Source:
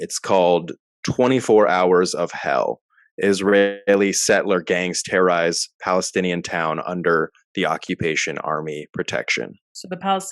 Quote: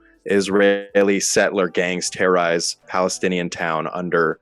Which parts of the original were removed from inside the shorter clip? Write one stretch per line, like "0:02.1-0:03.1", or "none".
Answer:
none